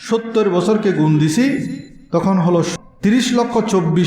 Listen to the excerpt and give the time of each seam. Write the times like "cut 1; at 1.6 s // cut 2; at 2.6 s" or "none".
cut 1; at 2.7 s